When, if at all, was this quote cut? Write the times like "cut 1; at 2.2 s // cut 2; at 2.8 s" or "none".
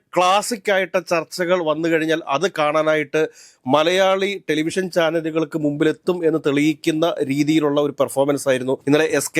none